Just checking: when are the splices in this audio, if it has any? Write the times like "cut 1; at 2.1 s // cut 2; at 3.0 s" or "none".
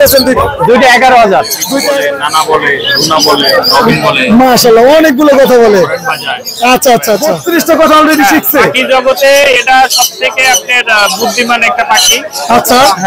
cut 1; at 1.9 s // cut 2; at 7.4 s

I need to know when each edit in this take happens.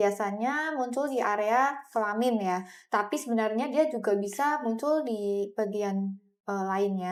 none

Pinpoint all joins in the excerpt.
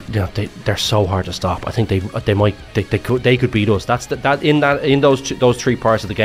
none

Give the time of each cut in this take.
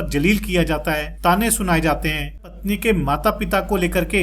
cut 1; at 1.1 s // cut 2; at 2.5 s

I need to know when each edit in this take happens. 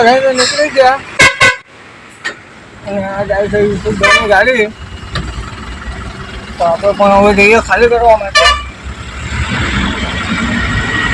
none

